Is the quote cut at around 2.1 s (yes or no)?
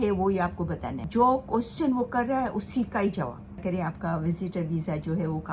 no